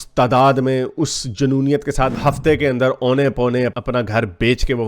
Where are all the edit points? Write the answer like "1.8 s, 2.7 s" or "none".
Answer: 2.1 s